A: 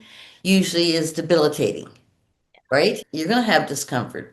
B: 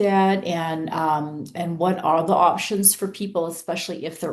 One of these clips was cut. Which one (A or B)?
A